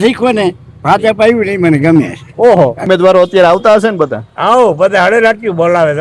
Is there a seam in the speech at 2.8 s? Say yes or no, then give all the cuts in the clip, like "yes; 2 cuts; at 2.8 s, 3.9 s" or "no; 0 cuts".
yes; 1 cut; at 2.8 s